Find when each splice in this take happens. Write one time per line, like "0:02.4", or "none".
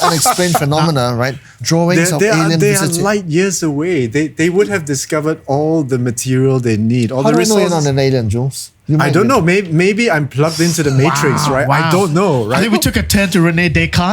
0:01.6